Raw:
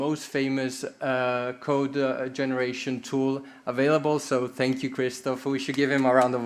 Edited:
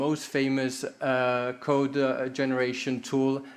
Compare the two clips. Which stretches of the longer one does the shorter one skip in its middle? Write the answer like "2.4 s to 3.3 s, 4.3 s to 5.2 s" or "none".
none